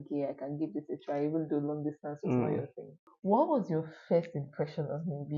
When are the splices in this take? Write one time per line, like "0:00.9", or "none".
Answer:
0:03.1

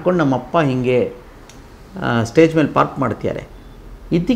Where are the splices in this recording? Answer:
none

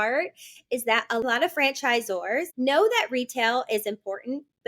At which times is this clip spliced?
0:01.2
0:02.5

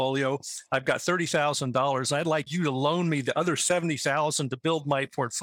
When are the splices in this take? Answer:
0:02.5

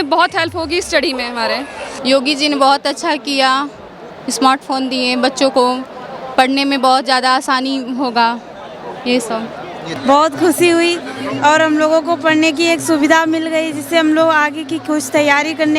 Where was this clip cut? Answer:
0:01.8
0:09.9

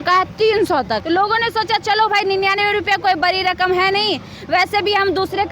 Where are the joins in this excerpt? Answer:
0:01.0

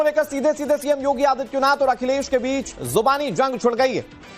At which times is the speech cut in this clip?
none

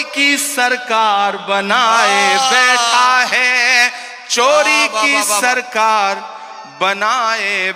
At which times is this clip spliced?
none

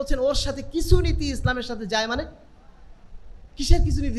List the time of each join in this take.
none

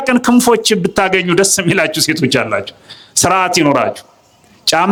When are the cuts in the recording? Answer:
none

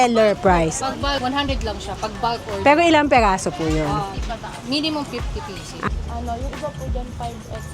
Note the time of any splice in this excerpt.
0:01.2
0:05.9

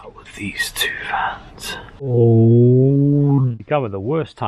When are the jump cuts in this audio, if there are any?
0:02.1
0:03.6

